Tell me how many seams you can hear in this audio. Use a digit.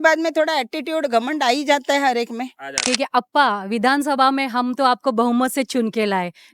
1